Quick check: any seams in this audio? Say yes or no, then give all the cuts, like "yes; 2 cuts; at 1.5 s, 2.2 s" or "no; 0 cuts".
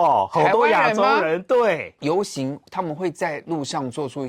yes; 1 cut; at 1.9 s